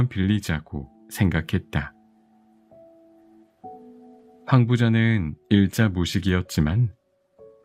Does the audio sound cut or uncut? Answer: cut